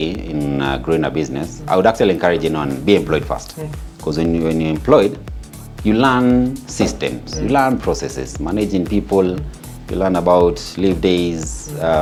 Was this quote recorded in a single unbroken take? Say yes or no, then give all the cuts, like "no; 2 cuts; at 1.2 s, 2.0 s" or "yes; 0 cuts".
yes; 0 cuts